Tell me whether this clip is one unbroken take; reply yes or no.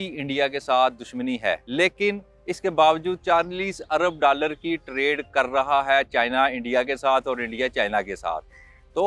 no